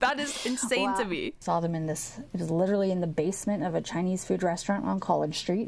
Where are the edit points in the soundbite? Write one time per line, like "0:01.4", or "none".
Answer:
0:01.4

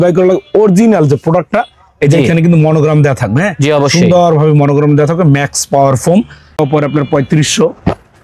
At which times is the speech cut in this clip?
0:06.5

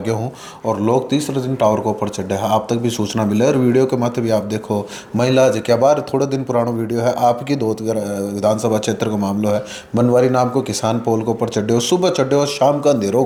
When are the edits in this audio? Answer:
none

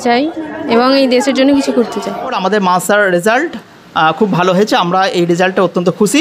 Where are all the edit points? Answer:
0:02.2

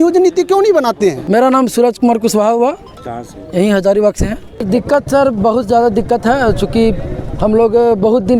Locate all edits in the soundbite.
none

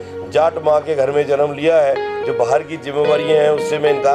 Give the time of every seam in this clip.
0:02.1

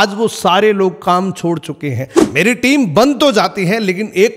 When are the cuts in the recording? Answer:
0:02.1

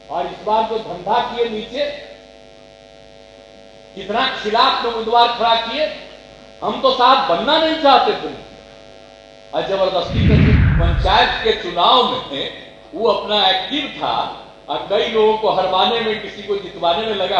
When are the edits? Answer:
0:10.6

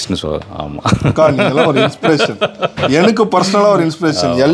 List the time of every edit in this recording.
none

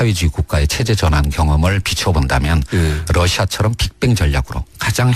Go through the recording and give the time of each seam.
none

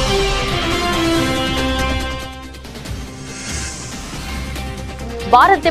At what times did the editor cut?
0:04.8

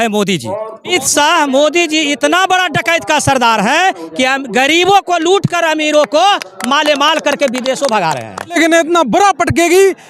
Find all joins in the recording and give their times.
0:00.9
0:08.6

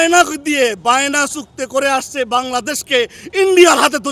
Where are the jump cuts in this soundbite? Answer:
none

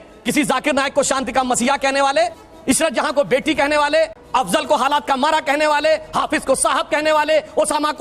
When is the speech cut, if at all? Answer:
0:02.5
0:04.2

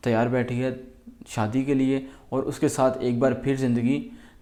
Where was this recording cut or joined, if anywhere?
none

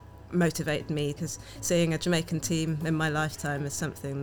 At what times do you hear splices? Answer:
0:01.2

